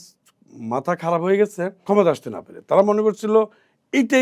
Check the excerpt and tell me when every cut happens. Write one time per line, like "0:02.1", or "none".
0:01.8